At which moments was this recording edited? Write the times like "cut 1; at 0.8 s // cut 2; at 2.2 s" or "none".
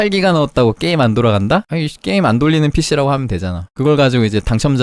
cut 1; at 1.8 s // cut 2; at 3.7 s